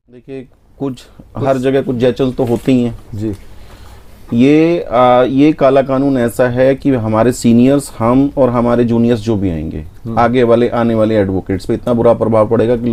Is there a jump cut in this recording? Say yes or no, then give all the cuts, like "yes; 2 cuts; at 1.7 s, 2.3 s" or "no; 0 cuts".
no; 0 cuts